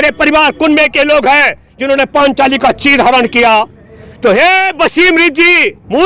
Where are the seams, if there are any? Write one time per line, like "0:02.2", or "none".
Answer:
none